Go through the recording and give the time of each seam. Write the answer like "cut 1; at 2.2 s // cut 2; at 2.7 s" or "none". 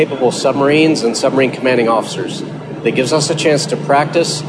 none